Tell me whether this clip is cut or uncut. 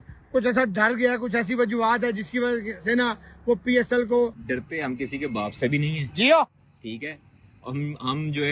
cut